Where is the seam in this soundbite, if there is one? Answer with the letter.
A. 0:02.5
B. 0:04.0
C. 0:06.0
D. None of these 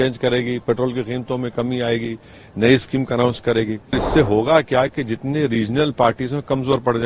B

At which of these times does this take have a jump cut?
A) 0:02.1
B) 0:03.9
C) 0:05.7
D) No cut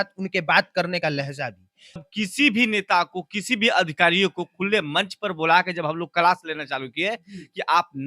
A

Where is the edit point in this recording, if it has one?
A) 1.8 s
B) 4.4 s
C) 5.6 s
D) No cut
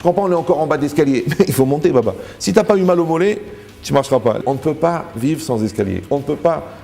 B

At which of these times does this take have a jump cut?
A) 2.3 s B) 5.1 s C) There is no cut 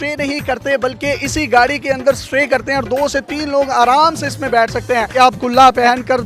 B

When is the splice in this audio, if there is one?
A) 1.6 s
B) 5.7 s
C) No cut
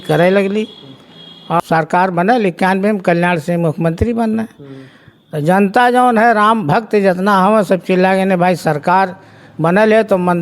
A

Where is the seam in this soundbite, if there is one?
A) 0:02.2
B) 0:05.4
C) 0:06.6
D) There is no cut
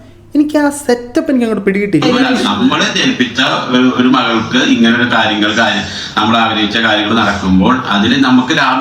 A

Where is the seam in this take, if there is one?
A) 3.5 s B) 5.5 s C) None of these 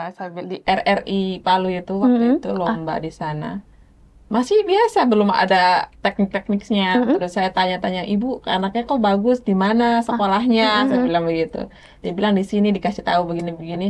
C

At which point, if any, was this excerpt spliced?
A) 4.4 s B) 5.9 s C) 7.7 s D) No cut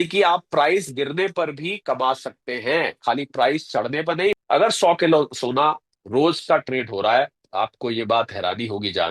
A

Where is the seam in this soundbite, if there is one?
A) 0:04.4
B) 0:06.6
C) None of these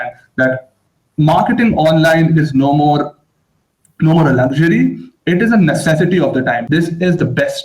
B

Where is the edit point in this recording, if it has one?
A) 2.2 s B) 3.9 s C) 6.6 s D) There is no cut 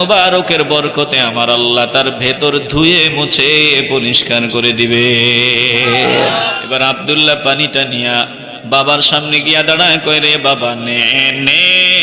C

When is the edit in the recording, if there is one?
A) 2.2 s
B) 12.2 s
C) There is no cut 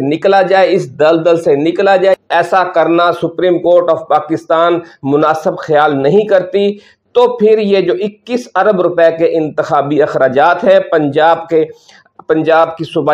A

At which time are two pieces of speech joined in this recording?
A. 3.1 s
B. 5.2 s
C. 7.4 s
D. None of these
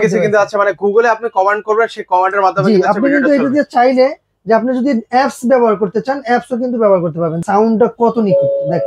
C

